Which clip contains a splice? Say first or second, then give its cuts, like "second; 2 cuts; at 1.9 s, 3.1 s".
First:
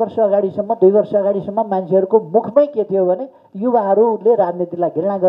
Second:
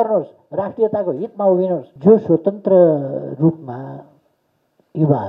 second; 1 cut; at 1.9 s